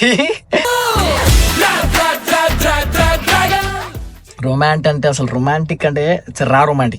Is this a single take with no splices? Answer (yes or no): no